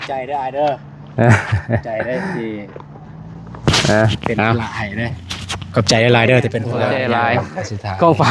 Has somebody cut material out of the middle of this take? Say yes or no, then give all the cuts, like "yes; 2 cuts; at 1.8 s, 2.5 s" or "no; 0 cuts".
yes; 1 cut; at 6.9 s